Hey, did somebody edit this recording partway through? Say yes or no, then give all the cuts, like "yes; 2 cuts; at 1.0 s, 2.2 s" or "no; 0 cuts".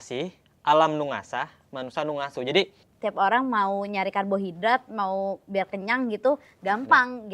yes; 1 cut; at 2.8 s